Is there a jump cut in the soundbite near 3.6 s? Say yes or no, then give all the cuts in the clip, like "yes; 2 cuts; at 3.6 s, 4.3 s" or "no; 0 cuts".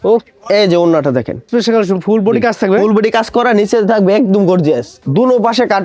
no; 2 cuts; at 1.5 s, 4.9 s